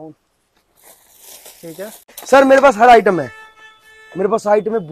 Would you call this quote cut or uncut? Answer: cut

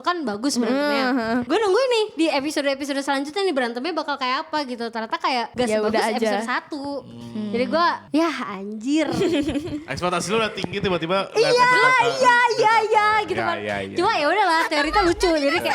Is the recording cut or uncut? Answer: cut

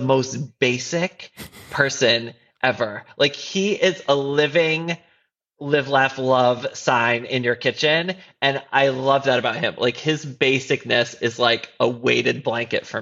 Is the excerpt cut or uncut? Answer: uncut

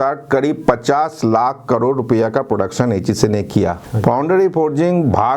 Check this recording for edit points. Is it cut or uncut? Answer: cut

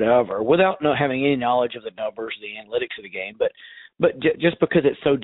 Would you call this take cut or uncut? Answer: uncut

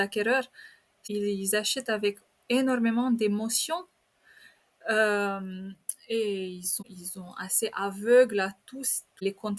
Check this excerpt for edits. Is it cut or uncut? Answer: cut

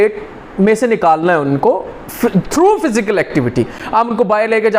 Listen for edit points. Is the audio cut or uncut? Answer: uncut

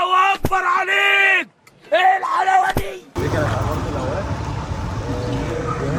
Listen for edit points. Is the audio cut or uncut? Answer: uncut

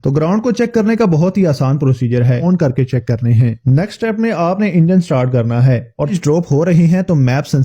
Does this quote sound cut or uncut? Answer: cut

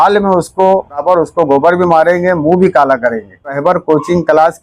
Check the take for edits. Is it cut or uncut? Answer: cut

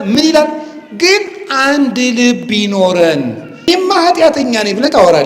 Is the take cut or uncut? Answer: cut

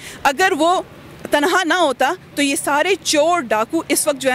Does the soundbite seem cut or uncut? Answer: uncut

